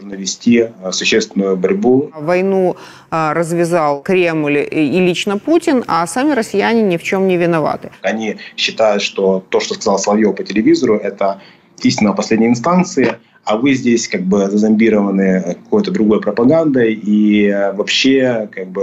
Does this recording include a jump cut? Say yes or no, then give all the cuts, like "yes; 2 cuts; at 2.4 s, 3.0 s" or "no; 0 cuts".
yes; 3 cuts; at 2.2 s, 4.0 s, 8.0 s